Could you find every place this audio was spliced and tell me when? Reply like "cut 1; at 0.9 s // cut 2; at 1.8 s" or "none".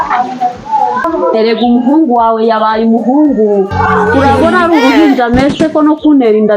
cut 1; at 1.1 s